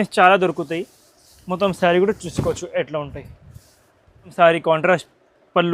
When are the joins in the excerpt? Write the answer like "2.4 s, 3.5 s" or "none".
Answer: 4.3 s